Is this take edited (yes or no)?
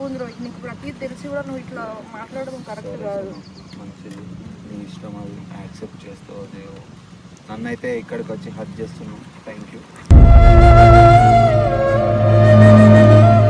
no